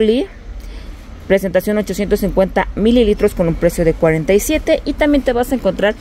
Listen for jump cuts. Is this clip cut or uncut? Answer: uncut